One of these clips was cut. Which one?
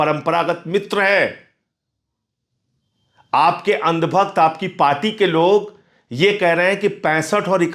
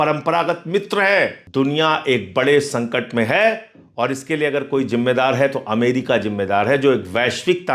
second; 1 cut; at 1.4 s

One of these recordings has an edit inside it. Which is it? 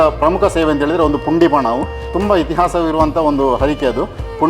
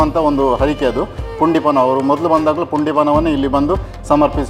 first; 1 cut; at 2.1 s

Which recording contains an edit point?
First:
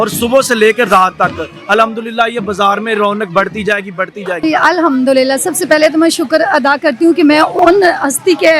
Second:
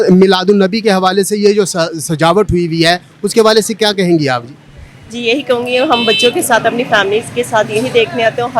first; 2 cuts; at 4.4 s, 7.6 s

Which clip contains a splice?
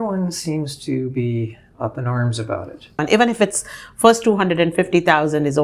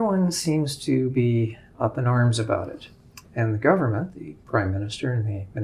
first; 1 cut; at 3.0 s

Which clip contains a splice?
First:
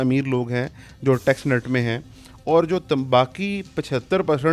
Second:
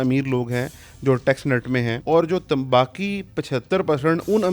second; 1 cut; at 2.0 s

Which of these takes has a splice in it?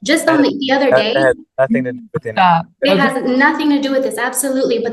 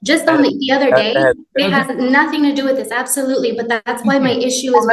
second; 1 cut; at 1.5 s

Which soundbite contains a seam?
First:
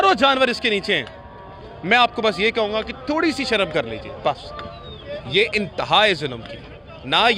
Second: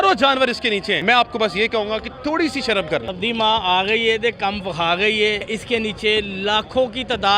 second; 3 cuts; at 1.0 s, 3.1 s, 5.4 s

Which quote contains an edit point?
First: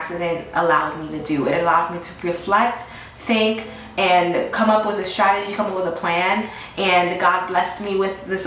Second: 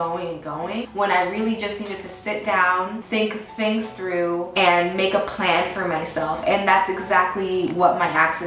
second; 3 cuts; at 0.9 s, 3.0 s, 4.5 s

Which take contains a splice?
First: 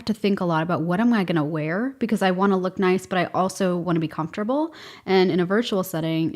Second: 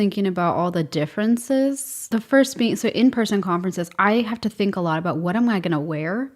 second; 1 cut; at 2.0 s

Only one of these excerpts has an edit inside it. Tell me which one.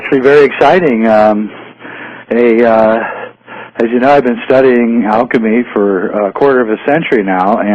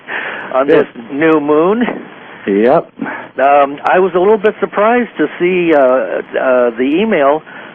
second; 1 cut; at 5.2 s

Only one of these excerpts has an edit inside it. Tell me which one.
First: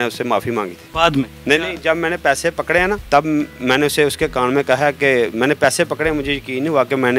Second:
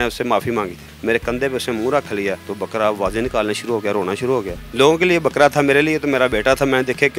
second; 2 cuts; at 0.9 s, 4.6 s

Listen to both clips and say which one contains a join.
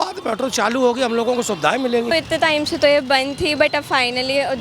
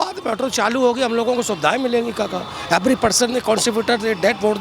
first; 1 cut; at 2.1 s

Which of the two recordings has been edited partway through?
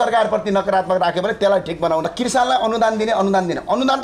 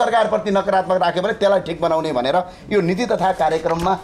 first; 1 cut; at 2.0 s

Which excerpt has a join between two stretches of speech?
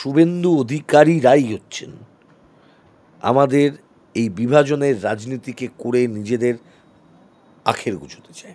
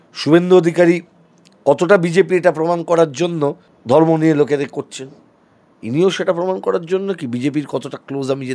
second; 1 cut; at 3.7 s

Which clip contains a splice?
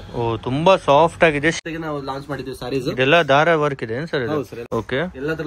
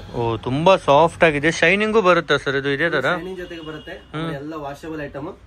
first; 2 cuts; at 1.6 s, 4.6 s

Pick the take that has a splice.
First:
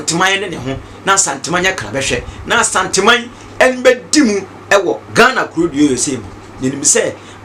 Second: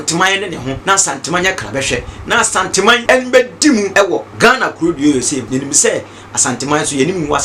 second; 4 cuts; at 0.8 s, 3.0 s, 3.9 s, 5.5 s

